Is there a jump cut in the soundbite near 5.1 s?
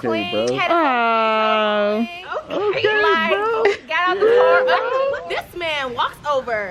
yes; 1 cut; at 5.1 s

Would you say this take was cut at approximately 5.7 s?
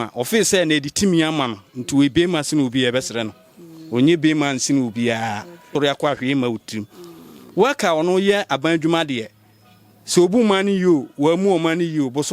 yes; 1 cut; at 5.7 s

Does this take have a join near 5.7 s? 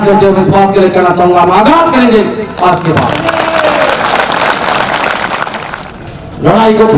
yes; 1 cut; at 5.7 s

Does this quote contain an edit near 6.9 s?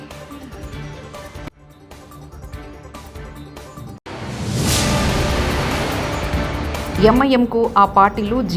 yes; 1 cut; at 6.9 s

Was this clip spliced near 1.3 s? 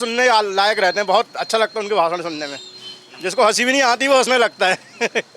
no; 0 cuts

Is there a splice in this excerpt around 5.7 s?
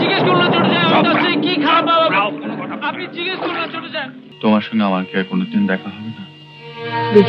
no; 1 cut; at 4.2 s

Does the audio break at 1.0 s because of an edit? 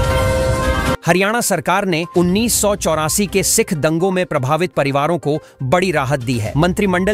yes; 1 cut; at 1.0 s

